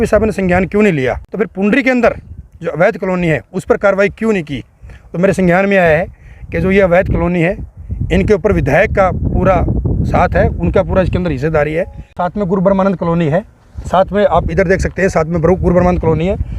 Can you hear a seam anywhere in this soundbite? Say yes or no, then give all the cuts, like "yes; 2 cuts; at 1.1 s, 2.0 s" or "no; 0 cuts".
yes; 2 cuts; at 1.2 s, 12.2 s